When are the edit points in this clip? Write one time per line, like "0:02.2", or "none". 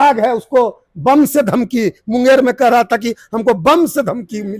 none